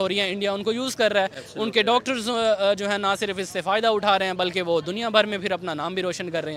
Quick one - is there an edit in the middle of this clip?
no; 0 cuts

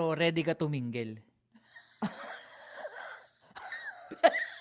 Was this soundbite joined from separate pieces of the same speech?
no; 0 cuts

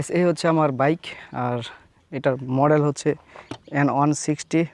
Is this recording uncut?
no; 1 cut; at 1.2 s

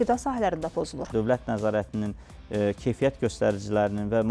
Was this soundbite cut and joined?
yes; 1 cut; at 1.1 s

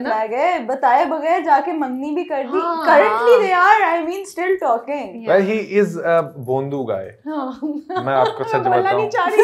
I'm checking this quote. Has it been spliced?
no; 0 cuts

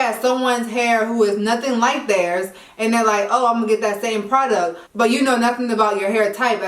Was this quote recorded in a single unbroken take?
no; 1 cut; at 4.8 s

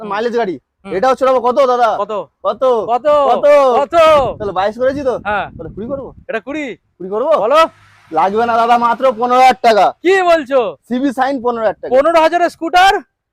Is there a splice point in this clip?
no; 0 cuts

